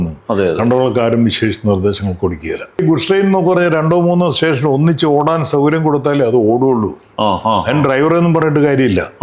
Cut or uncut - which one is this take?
cut